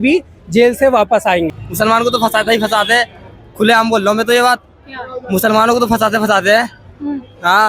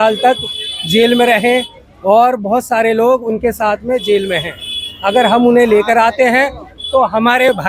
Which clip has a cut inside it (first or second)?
first